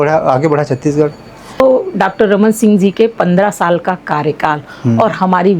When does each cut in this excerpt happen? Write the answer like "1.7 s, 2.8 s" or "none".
1.6 s